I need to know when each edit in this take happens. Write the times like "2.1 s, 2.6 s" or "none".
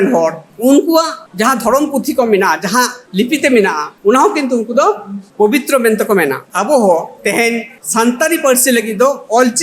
6.4 s, 7.7 s